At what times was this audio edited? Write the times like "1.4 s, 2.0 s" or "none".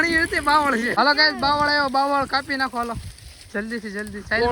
0.9 s